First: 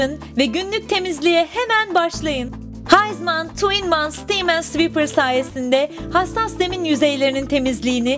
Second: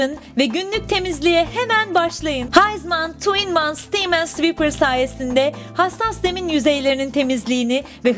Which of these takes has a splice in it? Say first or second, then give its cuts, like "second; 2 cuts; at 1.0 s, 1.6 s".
second; 1 cut; at 2.4 s